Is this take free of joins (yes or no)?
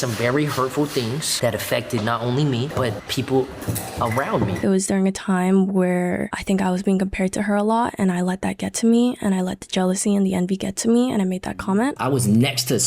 no